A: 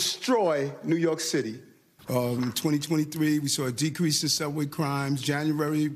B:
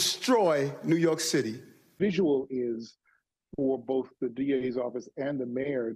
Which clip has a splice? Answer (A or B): A